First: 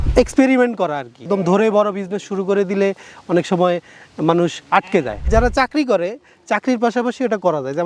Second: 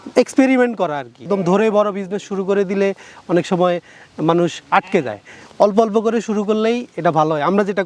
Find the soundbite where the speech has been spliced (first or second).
first